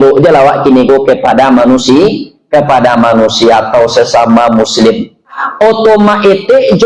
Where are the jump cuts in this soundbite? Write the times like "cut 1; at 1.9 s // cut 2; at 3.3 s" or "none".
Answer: cut 1; at 5.4 s